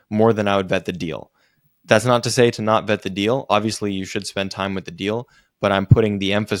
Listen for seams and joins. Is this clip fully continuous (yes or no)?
yes